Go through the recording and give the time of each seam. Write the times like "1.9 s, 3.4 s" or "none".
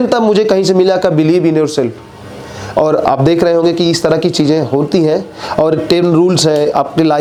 none

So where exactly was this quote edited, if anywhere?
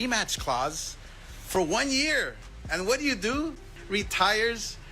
3.7 s

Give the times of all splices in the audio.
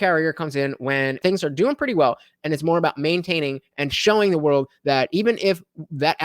1.2 s

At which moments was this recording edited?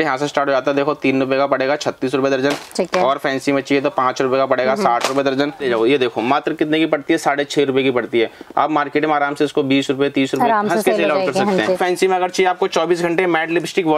5.6 s, 11.8 s

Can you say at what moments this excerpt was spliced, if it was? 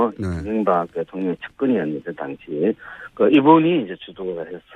2.7 s

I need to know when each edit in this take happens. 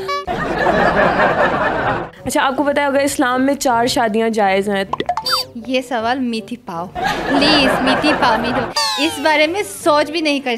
2.1 s, 4.9 s

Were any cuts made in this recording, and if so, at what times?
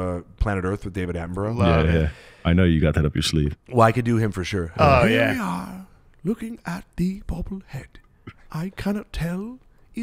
2.4 s

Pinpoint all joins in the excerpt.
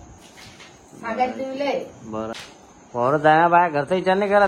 2.3 s

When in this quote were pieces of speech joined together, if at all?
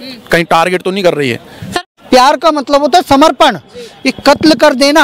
1.7 s

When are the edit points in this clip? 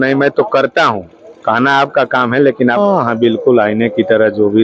2.8 s

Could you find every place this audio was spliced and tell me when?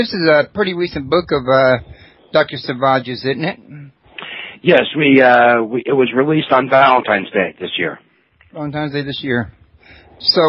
none

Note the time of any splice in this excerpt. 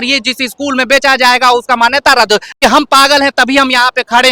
2.5 s

